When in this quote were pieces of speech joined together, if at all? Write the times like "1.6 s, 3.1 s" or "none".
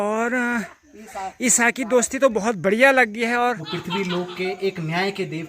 3.7 s